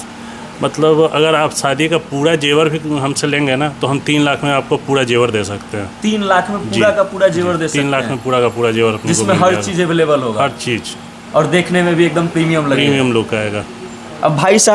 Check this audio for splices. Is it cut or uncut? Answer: uncut